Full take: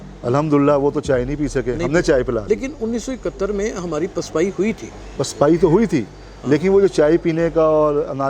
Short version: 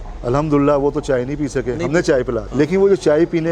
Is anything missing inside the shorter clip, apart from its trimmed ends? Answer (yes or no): yes